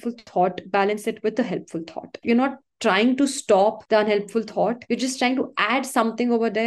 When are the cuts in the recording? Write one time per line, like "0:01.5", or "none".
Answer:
0:02.1
0:03.8
0:04.8

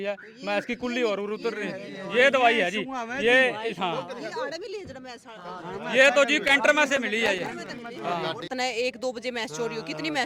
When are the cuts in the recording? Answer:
0:08.5

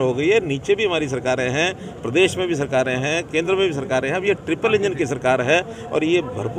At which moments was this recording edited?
none

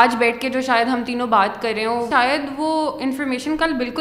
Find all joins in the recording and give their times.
0:02.1

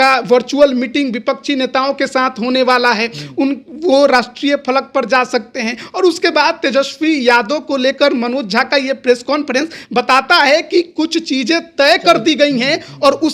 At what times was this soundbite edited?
none

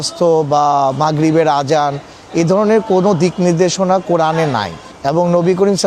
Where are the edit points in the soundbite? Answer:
none

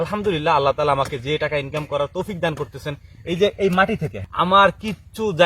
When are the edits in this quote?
0:04.1

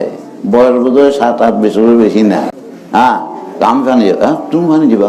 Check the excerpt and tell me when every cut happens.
0:02.6

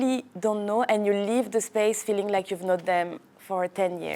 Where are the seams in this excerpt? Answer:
none

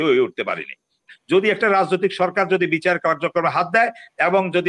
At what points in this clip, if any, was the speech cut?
0:01.1

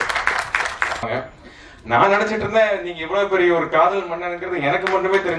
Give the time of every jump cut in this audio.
0:01.1

